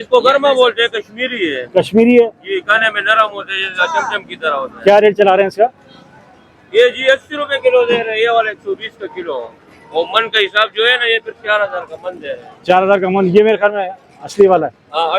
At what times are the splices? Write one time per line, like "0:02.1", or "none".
none